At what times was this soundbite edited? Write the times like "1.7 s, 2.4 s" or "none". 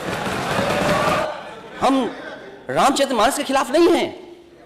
1.2 s